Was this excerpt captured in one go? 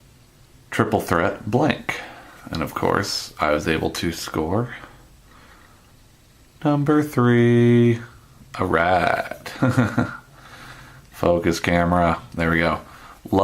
no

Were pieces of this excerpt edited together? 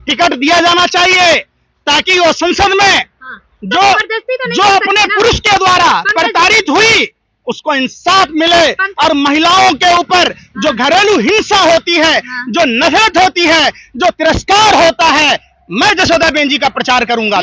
no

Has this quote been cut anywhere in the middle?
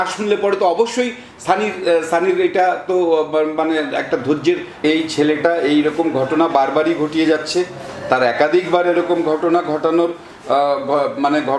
yes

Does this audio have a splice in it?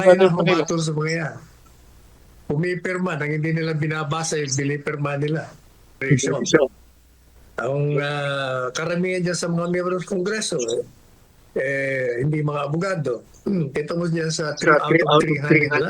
yes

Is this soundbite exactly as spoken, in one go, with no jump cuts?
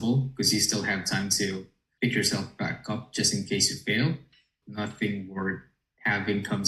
no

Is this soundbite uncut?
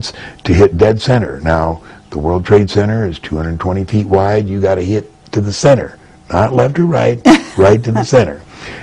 yes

